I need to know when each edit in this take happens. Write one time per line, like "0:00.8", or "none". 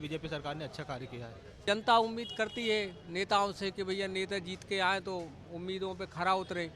0:01.6

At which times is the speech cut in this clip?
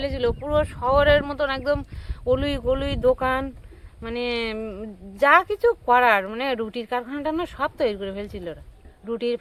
none

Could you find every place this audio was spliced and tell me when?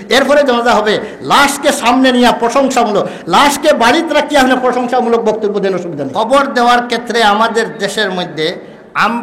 0:06.1

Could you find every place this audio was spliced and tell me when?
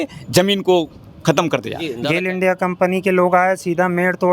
0:01.9

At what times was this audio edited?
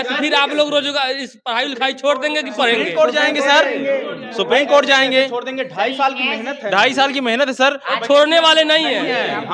none

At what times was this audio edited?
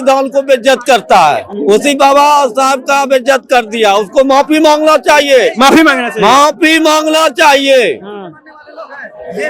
none

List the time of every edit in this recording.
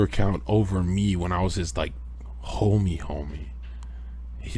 none

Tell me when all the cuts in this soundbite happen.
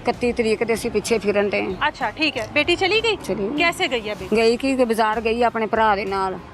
0:03.2
0:04.2

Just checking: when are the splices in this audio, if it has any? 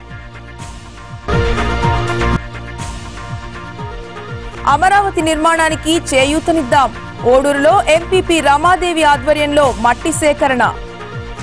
none

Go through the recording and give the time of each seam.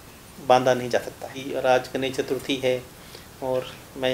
0:01.4

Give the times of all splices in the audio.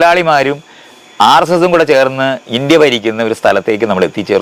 none

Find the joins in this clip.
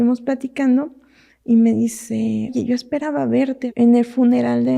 0:02.5
0:03.7

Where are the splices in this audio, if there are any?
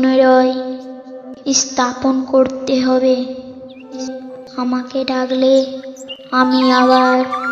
0:04.1

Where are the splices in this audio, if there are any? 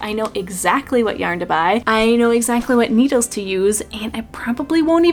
none

